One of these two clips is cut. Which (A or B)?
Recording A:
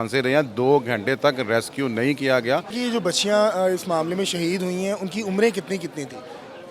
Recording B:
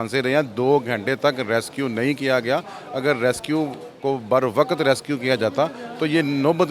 A